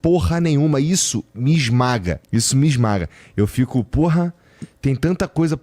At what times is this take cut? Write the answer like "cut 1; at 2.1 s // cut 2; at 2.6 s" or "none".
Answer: cut 1; at 2.2 s